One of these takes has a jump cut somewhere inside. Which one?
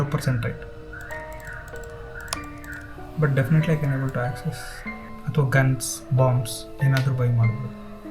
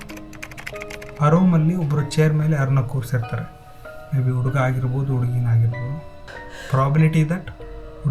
first; 1 cut; at 5.1 s

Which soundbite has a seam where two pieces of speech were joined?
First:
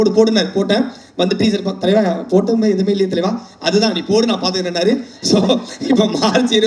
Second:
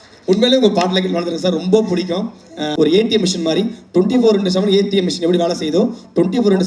second; 1 cut; at 2.6 s

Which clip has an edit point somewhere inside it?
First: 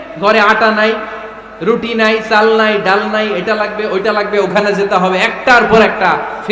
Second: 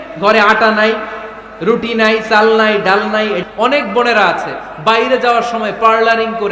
second; 1 cut; at 3.4 s

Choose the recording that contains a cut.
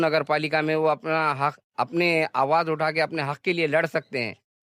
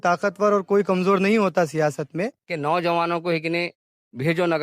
second; 1 cut; at 2.4 s

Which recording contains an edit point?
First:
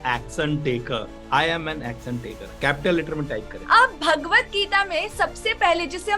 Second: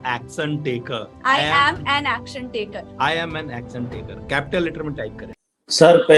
first; 2 cuts; at 1.1 s, 3.5 s

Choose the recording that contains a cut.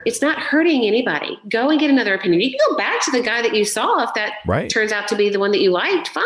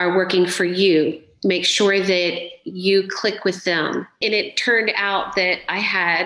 second; 1 cut; at 4.2 s

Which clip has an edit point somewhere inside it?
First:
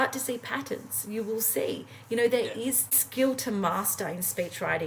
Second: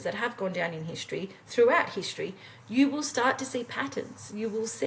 first; 1 cut; at 3.0 s

